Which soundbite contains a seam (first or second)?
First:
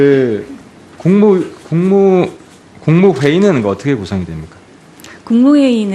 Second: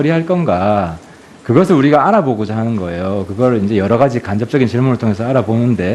first